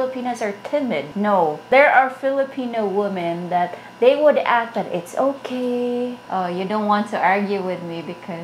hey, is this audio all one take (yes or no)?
no